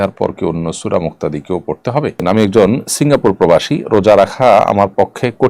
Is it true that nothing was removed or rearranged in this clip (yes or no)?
no